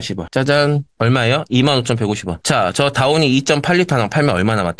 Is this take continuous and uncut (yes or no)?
yes